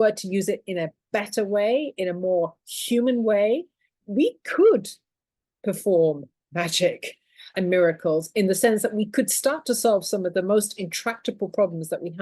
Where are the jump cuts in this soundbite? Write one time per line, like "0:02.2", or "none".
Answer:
0:04.0

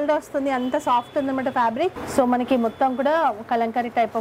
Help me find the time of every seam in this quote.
0:02.0

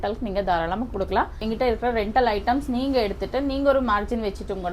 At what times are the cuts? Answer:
0:01.4

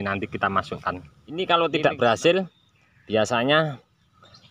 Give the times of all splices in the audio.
0:01.4

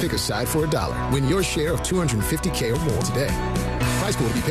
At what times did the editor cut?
none

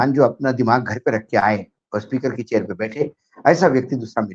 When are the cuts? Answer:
none

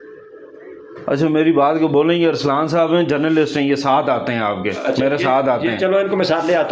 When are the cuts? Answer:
none

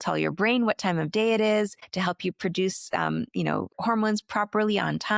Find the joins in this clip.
0:01.8
0:03.7

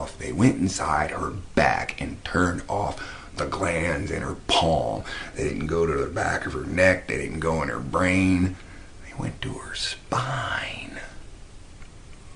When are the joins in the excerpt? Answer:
none

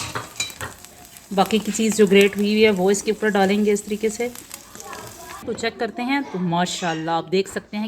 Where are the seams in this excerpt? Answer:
0:05.4

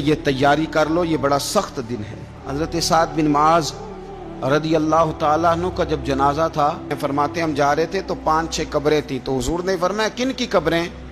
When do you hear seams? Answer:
0:02.4
0:06.9

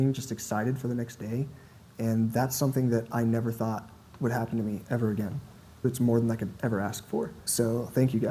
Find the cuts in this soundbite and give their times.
0:05.6
0:07.4

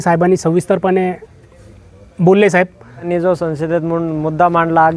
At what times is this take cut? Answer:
0:03.1

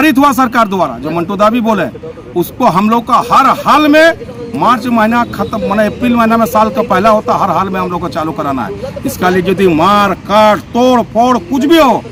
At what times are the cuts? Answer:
none

